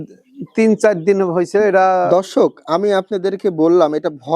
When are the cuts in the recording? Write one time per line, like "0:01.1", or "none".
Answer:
0:02.1